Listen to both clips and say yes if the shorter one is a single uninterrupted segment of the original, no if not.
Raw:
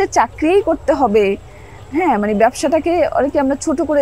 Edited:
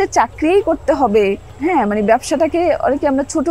no